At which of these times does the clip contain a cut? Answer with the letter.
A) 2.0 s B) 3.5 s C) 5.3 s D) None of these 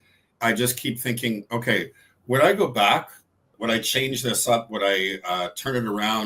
B